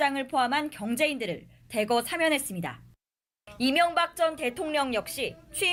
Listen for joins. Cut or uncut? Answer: uncut